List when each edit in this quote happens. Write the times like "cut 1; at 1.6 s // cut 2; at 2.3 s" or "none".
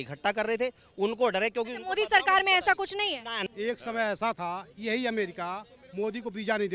cut 1; at 3.4 s